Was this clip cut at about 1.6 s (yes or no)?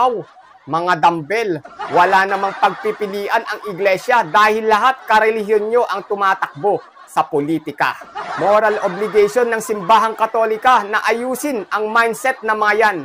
no